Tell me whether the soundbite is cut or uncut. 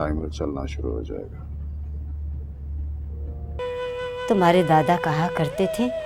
cut